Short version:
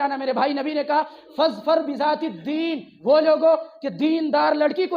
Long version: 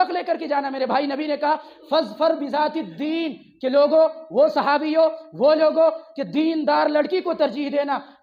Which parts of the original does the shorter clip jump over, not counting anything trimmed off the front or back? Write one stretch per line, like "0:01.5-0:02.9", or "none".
0:03.4-0:05.3